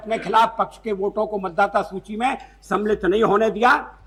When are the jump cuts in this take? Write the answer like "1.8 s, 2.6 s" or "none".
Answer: none